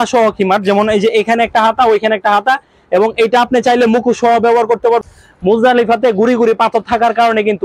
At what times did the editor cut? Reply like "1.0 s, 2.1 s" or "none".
5.0 s